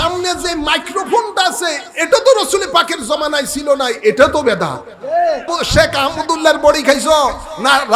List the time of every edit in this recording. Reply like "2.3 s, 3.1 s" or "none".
5.5 s